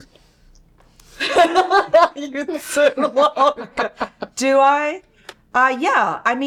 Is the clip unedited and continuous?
yes; 0 cuts

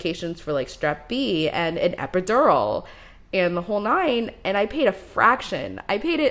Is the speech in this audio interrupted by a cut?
no; 0 cuts

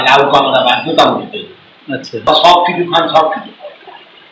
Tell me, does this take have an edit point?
yes; 1 cut; at 2.3 s

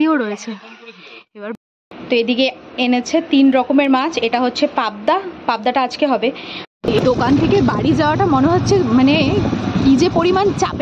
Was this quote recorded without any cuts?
no; 2 cuts; at 1.6 s, 6.5 s

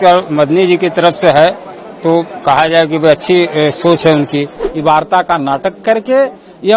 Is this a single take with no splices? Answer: no; 1 cut; at 4.6 s

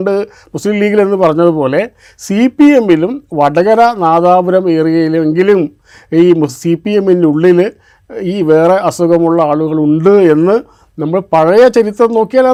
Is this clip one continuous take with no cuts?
yes; 0 cuts

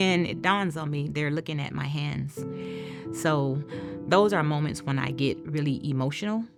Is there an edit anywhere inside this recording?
no; 0 cuts

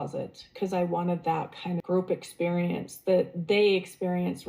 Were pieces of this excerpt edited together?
yes; 1 cut; at 1.8 s

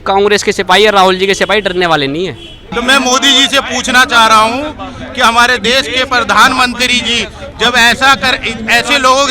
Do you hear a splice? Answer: yes; 1 cut; at 2.6 s

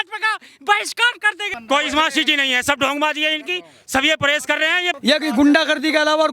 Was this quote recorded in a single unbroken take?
no; 2 cuts; at 1.5 s, 4.9 s

